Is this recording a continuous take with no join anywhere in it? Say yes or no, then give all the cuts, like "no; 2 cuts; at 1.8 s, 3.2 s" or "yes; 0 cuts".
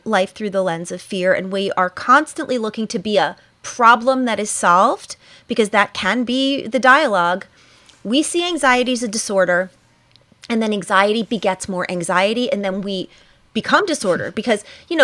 yes; 0 cuts